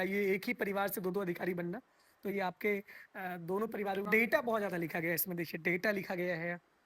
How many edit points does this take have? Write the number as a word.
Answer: one